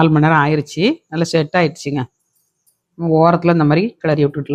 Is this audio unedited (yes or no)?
yes